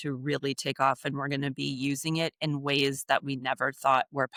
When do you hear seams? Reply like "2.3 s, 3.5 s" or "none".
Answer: none